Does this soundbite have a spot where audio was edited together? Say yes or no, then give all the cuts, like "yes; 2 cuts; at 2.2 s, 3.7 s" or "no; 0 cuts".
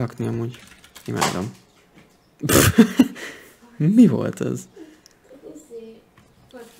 no; 0 cuts